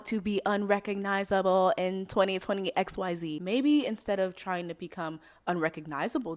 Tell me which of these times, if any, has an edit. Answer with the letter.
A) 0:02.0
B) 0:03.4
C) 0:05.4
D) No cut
B